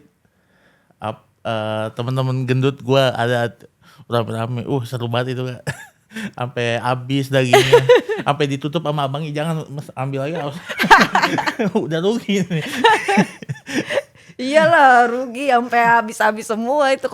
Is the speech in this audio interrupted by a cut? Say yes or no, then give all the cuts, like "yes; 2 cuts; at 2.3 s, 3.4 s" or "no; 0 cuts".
no; 0 cuts